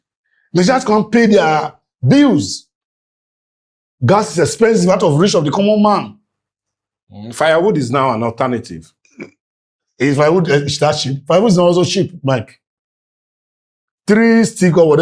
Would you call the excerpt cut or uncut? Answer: uncut